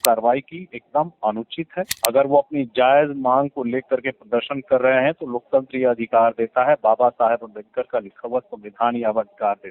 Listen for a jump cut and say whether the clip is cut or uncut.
cut